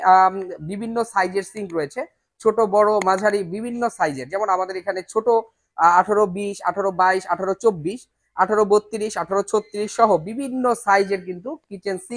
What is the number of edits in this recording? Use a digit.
0